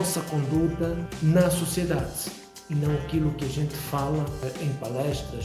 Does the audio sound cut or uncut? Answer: cut